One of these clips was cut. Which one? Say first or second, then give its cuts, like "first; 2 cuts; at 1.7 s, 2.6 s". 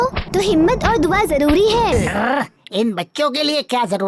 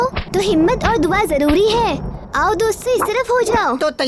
first; 1 cut; at 1.9 s